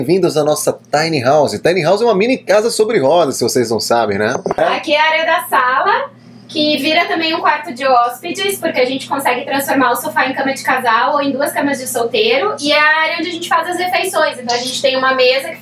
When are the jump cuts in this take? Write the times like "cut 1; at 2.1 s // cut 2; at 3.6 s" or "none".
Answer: cut 1; at 4.6 s